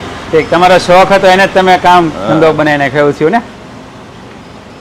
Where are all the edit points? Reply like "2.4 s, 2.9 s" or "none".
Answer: none